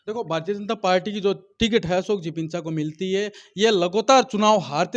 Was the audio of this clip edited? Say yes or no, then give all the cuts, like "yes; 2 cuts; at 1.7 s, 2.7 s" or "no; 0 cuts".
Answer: no; 0 cuts